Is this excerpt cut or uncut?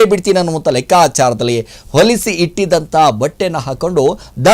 uncut